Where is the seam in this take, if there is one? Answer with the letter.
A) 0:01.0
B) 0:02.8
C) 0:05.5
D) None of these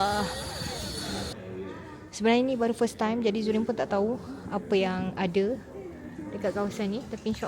A